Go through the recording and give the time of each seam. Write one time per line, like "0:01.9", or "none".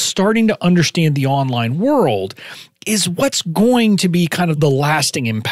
0:04.6

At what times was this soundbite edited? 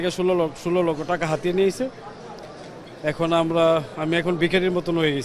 none

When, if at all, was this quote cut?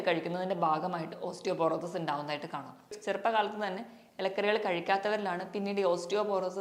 0:02.9

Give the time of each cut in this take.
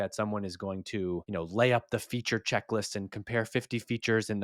0:01.3

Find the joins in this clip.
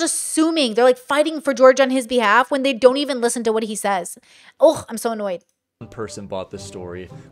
none

